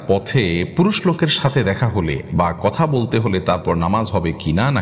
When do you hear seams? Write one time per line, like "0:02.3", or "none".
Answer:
none